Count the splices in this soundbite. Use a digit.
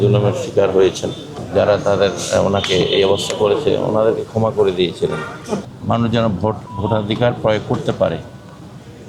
2